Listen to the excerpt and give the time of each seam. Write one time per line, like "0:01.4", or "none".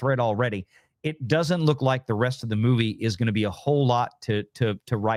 none